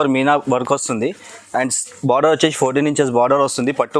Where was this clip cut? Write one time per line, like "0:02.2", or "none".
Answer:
none